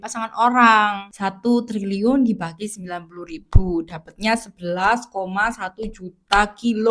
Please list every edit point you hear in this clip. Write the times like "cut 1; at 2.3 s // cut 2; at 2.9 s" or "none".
cut 1; at 1.0 s